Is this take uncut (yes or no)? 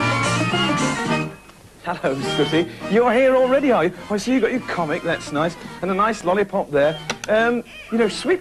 no